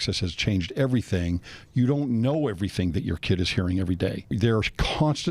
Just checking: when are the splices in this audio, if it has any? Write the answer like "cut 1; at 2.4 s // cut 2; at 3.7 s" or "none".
cut 1; at 4.3 s

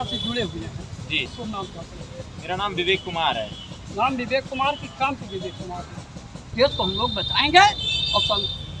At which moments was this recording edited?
cut 1; at 1.3 s // cut 2; at 6.5 s

